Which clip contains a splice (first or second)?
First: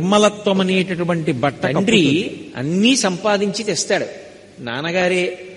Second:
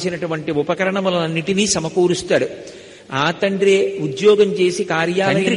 first